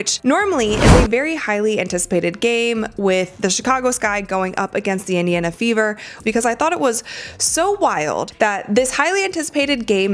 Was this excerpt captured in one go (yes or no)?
no